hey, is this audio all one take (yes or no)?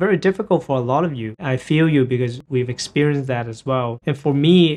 no